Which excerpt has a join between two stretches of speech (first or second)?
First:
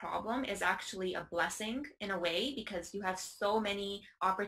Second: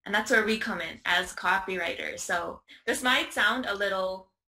second